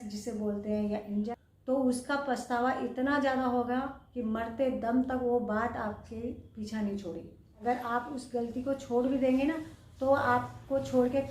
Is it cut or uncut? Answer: cut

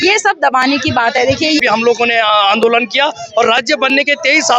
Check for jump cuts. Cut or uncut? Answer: cut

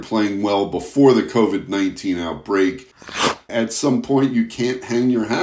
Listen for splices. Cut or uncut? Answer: cut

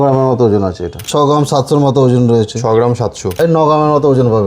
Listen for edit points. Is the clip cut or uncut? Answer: cut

